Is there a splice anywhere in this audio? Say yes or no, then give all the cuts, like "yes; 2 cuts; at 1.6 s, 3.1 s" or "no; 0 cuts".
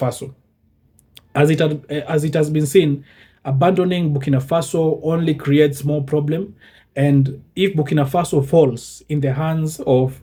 no; 0 cuts